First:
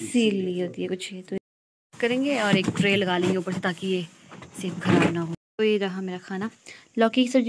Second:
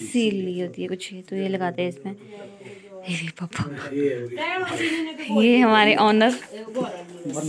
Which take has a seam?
first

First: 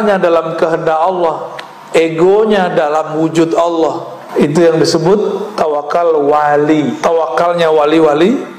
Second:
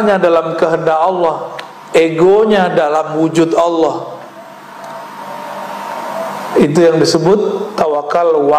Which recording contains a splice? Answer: first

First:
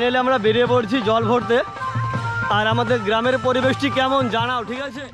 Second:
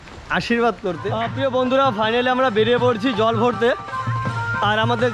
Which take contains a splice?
second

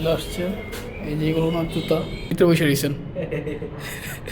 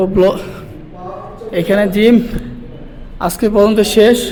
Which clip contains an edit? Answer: first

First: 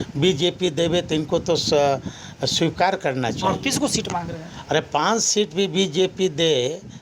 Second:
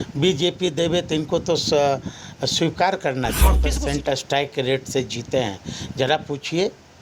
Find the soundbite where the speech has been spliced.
second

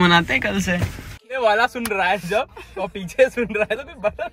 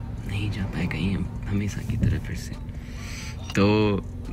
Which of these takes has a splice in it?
first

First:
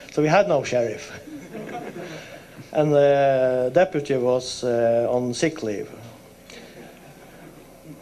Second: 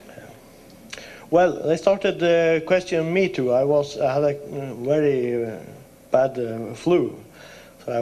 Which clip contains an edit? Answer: second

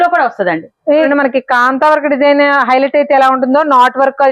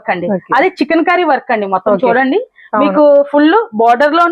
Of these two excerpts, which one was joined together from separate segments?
first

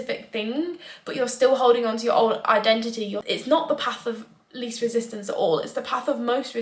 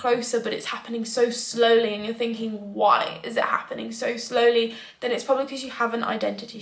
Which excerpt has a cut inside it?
first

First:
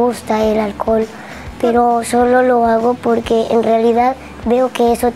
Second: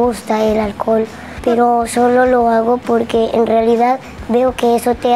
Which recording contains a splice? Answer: second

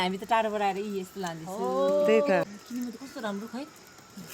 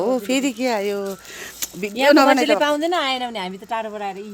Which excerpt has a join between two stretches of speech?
first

